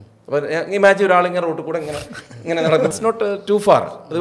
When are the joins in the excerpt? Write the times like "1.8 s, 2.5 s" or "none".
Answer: 2.9 s